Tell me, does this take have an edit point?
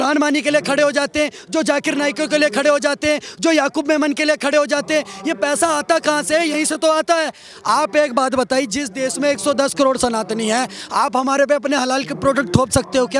no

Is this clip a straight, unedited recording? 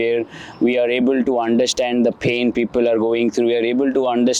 yes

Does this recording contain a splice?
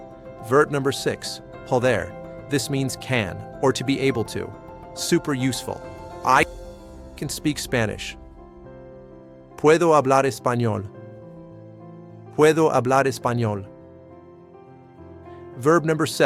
no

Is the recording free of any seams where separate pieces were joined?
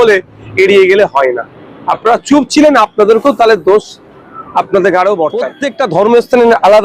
no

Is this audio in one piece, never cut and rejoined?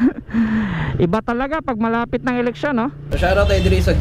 no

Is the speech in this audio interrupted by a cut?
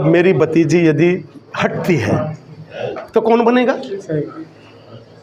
no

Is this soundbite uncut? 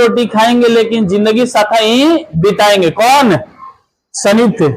yes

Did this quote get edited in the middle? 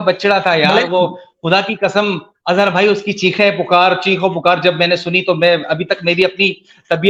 no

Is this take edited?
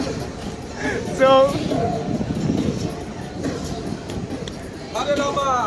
no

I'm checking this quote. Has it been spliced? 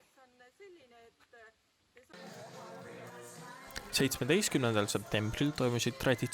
yes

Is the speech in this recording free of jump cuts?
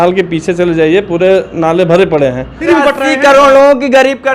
no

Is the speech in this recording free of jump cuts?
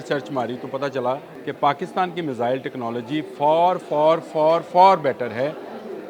no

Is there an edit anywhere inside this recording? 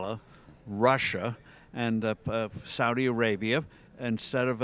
no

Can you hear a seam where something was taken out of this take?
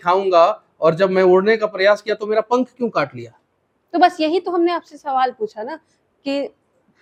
no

